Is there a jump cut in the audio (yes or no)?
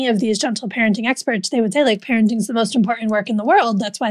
no